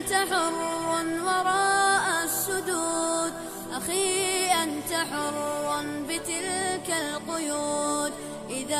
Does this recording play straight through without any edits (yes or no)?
yes